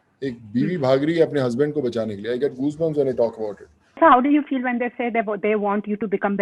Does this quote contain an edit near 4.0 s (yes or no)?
yes